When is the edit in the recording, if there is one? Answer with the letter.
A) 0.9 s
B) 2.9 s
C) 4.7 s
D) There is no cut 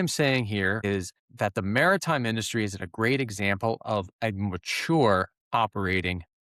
A